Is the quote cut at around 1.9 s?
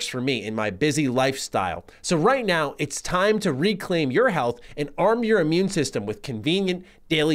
yes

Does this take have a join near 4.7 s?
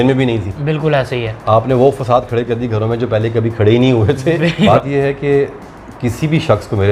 yes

